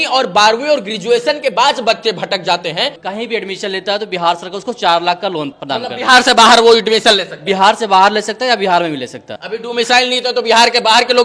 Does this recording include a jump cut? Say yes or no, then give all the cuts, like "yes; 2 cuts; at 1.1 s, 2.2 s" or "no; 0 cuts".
yes; 3 cuts; at 3.0 s, 5.5 s, 9.3 s